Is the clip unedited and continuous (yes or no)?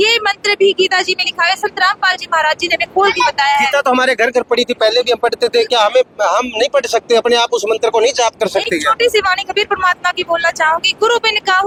yes